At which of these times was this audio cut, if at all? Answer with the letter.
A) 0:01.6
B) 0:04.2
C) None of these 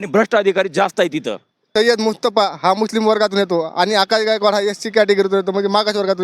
A